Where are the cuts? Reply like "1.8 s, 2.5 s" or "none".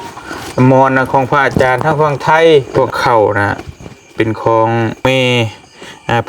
2.7 s, 5.0 s